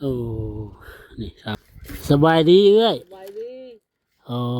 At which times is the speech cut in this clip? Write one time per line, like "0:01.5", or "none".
0:01.6